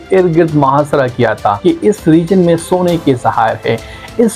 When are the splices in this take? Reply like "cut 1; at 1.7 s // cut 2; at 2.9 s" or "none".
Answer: cut 1; at 1.6 s